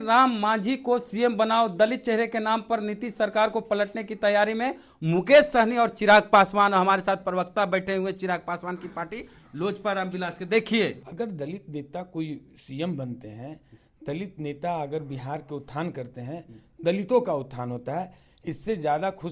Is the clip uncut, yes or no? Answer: no